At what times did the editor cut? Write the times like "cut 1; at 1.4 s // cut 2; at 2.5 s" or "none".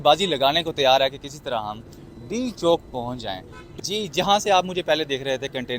cut 1; at 3.7 s